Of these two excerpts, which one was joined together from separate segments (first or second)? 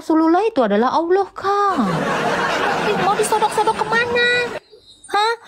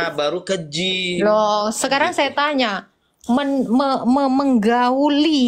first